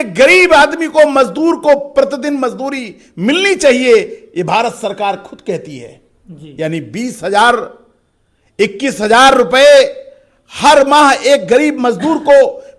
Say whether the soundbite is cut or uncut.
uncut